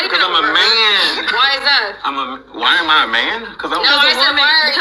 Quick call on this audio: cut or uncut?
uncut